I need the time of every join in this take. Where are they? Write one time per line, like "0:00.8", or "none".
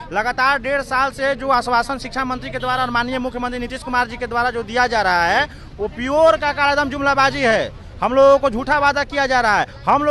none